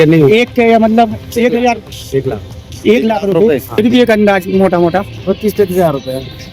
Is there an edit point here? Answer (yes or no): yes